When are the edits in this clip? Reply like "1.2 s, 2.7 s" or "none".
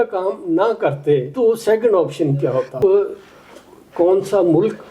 1.3 s, 2.7 s